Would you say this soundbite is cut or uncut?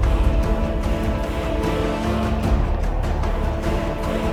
uncut